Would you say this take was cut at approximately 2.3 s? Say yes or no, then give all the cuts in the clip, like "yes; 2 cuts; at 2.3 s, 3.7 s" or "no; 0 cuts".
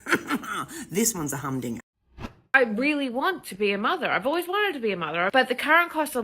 yes; 1 cut; at 2.3 s